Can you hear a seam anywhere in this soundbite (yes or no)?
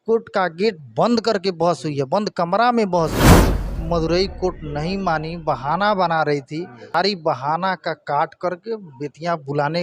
yes